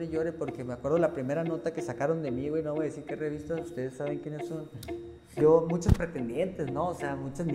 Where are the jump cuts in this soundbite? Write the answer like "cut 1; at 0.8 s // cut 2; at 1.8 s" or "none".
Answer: cut 1; at 5.3 s